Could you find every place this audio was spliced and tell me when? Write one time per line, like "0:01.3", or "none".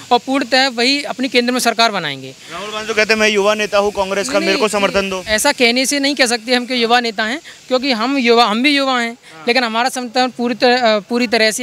none